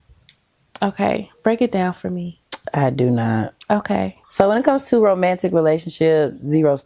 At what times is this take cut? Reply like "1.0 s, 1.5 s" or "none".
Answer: 4.2 s